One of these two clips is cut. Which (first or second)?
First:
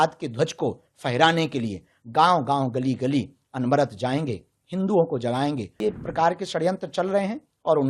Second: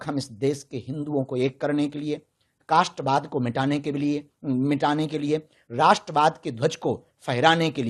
first